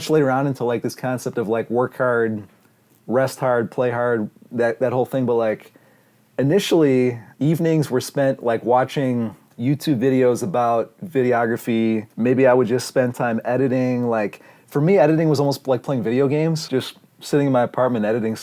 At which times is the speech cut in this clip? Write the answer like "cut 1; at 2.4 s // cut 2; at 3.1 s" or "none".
cut 1; at 7.3 s // cut 2; at 9.4 s // cut 3; at 12.1 s // cut 4; at 16.6 s